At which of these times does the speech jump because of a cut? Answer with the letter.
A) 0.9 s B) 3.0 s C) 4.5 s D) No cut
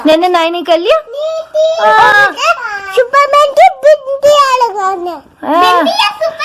D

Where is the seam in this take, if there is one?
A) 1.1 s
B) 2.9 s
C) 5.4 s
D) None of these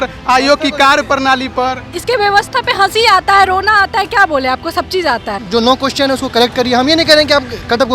C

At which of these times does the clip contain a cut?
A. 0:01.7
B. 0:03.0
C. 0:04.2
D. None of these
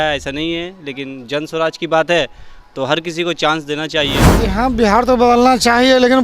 C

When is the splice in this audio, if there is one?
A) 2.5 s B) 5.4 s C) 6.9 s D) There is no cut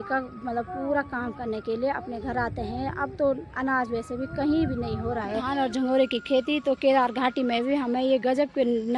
B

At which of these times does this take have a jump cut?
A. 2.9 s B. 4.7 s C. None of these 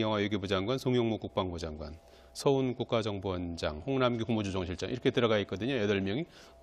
B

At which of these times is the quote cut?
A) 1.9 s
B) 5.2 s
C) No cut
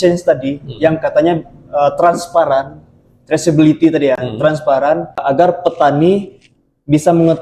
B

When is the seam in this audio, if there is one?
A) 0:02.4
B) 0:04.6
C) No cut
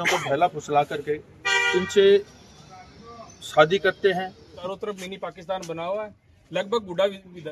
B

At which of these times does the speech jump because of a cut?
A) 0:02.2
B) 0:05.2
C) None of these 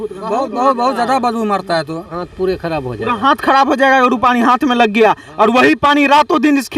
A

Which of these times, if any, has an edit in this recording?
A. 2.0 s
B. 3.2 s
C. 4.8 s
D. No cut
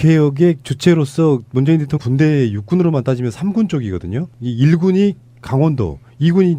D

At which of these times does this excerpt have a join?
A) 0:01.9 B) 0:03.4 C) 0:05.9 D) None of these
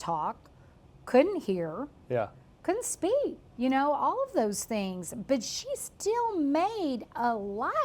B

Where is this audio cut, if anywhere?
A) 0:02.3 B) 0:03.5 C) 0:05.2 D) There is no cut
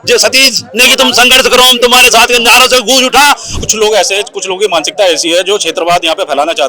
B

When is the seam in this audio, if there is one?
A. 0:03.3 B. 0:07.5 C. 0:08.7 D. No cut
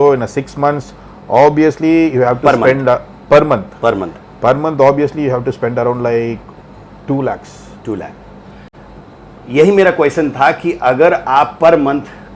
D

